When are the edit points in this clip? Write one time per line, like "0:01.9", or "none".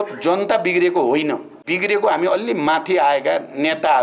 0:01.6